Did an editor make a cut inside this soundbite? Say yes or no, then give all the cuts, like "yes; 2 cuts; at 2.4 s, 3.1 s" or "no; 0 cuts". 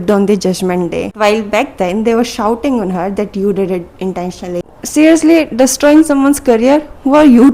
yes; 2 cuts; at 1.1 s, 4.6 s